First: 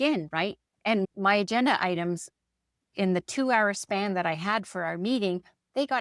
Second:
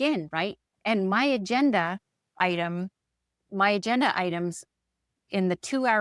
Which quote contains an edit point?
first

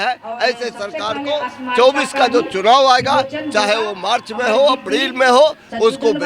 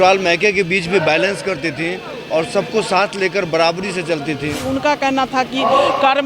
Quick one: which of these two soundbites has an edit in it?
second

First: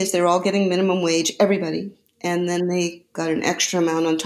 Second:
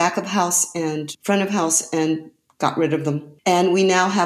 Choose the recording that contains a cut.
second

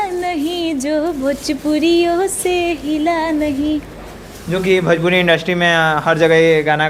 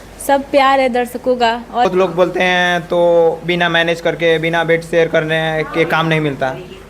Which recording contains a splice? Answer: second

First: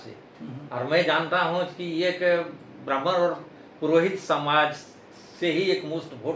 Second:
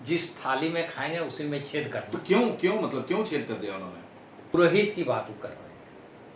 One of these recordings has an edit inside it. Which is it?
second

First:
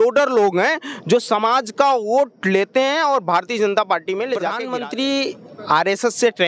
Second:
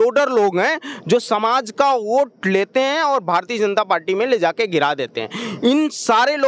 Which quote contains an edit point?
first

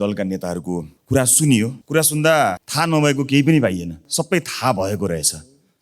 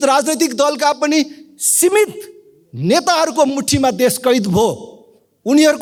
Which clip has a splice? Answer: first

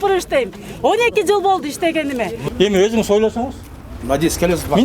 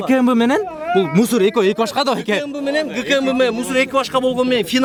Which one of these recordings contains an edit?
first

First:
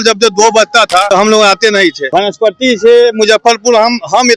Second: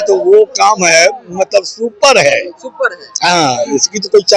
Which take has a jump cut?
first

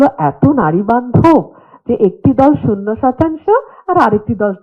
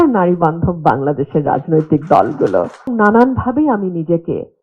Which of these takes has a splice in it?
second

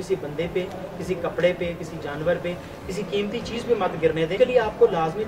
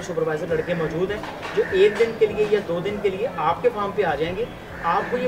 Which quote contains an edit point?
first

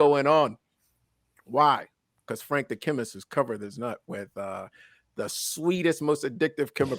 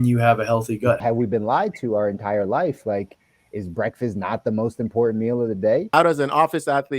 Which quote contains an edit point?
second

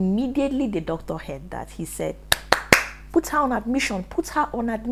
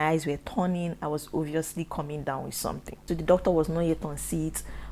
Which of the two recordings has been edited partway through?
second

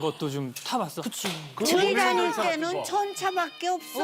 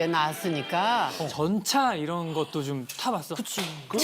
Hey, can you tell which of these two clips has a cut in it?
second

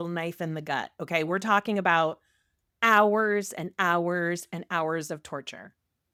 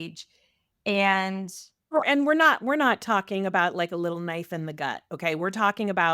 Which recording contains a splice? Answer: second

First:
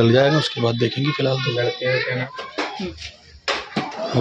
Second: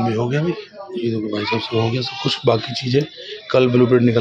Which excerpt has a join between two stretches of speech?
first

